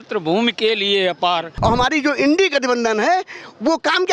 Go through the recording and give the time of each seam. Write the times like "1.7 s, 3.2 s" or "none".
1.5 s